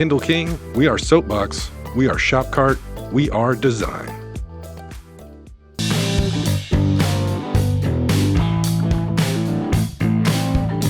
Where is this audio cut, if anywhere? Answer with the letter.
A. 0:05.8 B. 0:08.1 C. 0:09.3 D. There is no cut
A